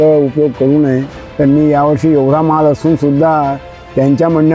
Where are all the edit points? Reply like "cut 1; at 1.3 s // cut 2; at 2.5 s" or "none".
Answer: none